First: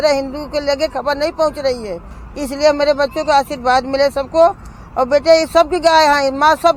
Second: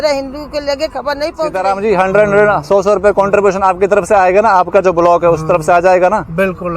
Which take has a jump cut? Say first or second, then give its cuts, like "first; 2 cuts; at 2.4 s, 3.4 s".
second; 1 cut; at 1.6 s